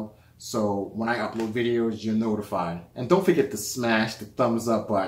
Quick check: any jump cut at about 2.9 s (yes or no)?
yes